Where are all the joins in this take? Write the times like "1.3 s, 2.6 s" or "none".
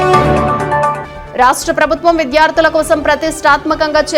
0.9 s